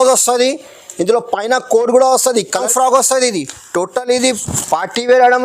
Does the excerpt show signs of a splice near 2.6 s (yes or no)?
yes